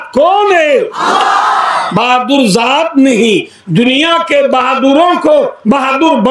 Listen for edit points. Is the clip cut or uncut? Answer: uncut